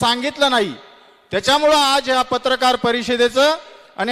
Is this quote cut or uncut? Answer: uncut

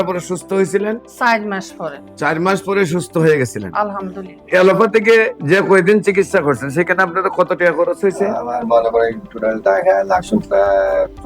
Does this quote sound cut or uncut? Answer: cut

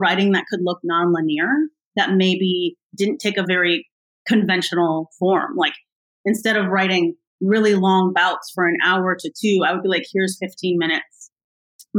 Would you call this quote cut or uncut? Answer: cut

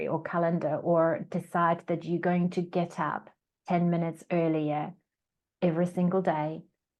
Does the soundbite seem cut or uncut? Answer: uncut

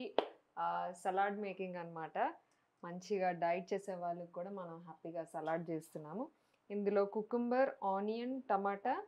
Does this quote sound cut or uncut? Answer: uncut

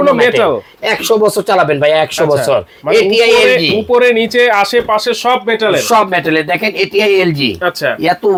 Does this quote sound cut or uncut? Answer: uncut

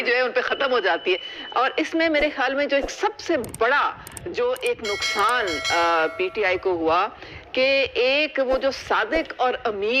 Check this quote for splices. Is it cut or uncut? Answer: cut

